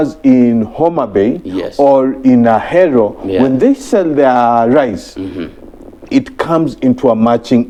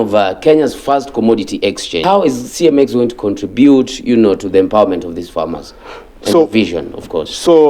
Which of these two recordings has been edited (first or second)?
second